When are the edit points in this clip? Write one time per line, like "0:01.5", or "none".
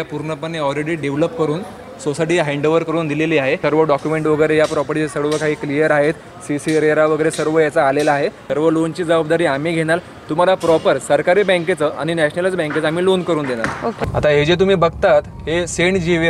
0:03.6
0:08.4
0:14.0